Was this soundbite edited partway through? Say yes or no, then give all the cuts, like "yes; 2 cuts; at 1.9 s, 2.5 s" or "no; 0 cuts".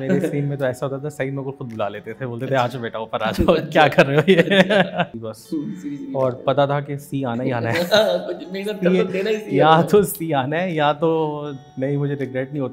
yes; 2 cuts; at 5.2 s, 11.6 s